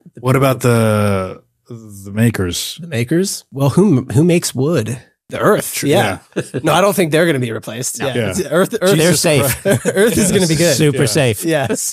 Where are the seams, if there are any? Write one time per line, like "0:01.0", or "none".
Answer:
0:03.4
0:05.3

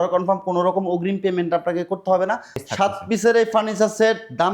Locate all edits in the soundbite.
0:02.6

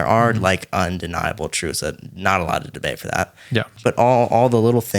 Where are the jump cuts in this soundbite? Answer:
0:03.7

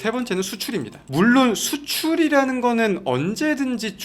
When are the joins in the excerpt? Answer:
0:01.0

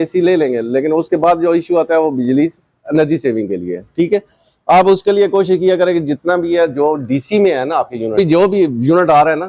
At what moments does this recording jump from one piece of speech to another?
0:08.1

